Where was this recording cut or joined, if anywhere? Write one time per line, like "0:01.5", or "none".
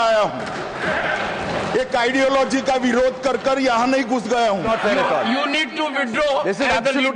0:04.6

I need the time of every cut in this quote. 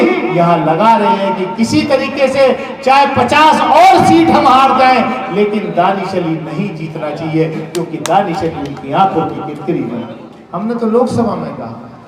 0:10.8

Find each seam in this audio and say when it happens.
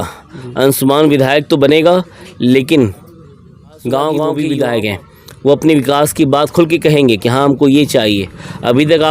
0:04.4

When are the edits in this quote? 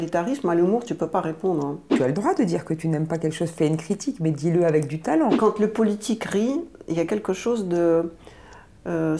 0:01.8
0:05.4

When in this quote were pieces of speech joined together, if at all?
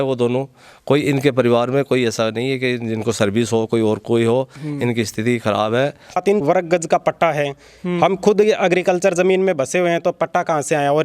0:06.2

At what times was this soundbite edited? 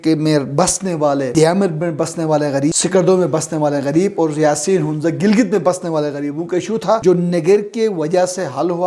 0:01.3
0:02.8
0:07.0

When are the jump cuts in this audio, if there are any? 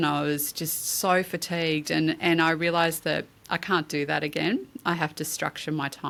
none

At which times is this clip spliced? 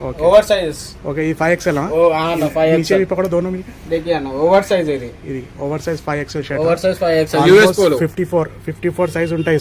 none

